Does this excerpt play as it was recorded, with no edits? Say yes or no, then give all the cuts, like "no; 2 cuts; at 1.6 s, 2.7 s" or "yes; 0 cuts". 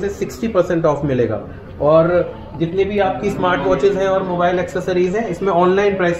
yes; 0 cuts